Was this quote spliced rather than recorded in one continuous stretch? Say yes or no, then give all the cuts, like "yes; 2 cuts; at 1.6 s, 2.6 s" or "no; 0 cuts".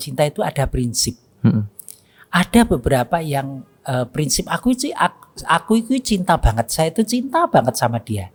no; 0 cuts